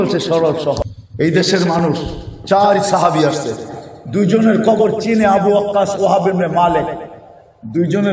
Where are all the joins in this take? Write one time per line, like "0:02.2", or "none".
0:01.0